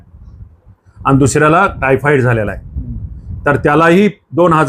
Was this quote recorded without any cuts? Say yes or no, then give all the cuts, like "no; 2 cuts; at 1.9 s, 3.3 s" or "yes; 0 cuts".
yes; 0 cuts